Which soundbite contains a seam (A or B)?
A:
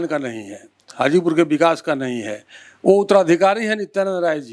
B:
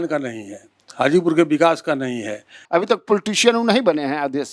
B